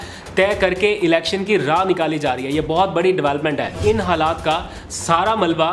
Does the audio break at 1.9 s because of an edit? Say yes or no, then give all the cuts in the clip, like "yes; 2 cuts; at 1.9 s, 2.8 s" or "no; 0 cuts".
no; 1 cut; at 3.8 s